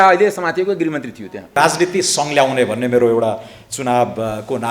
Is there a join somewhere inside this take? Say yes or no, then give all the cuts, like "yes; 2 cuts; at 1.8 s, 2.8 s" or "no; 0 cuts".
yes; 1 cut; at 1.5 s